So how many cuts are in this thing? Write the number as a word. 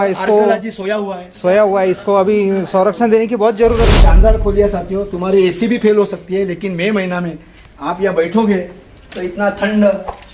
one